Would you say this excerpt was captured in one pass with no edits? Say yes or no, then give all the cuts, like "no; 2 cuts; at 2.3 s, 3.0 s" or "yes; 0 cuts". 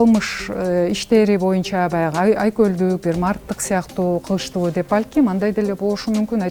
yes; 0 cuts